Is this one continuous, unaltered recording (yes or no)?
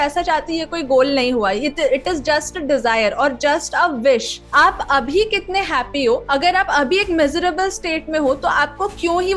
no